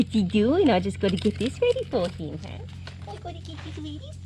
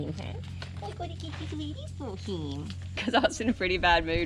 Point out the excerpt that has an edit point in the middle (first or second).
second